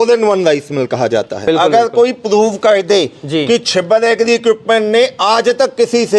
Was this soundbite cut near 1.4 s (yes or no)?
yes